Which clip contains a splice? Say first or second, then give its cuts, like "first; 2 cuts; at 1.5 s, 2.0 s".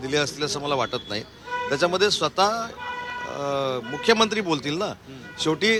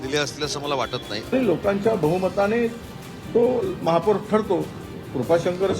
second; 1 cut; at 1.3 s